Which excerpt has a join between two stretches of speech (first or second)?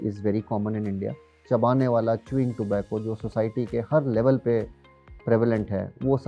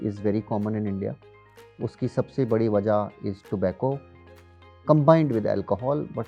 first